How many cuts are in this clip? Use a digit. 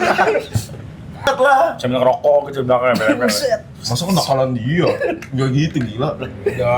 1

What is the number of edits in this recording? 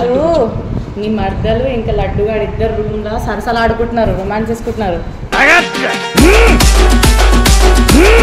0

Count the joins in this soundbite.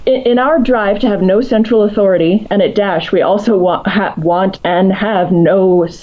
0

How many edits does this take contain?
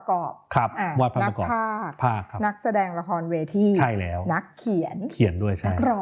0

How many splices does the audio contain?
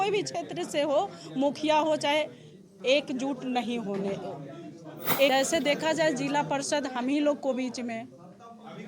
1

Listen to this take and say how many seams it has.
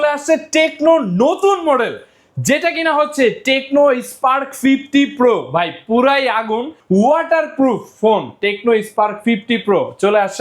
1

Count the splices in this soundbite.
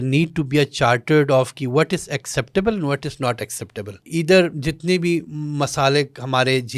1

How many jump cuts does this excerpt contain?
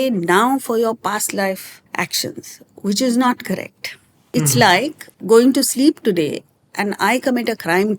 3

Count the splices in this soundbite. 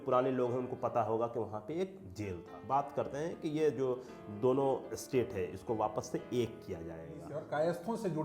2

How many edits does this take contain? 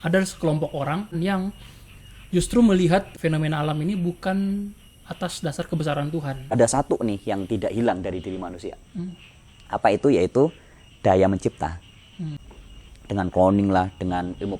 4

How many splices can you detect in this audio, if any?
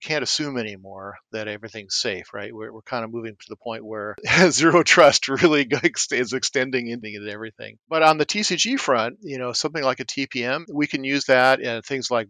3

